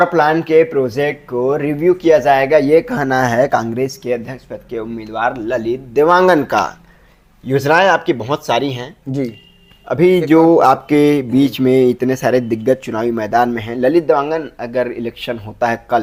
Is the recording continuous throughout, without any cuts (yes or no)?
yes